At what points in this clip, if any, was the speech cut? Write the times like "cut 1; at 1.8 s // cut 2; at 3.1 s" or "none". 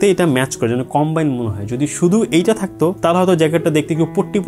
none